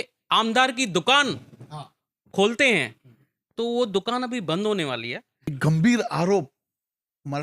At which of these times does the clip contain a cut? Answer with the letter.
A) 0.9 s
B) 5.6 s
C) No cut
B